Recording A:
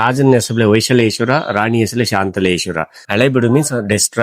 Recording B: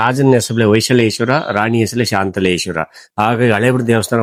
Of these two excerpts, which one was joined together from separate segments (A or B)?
A